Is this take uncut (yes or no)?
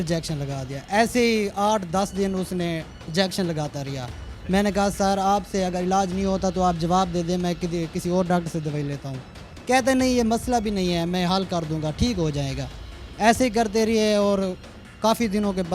yes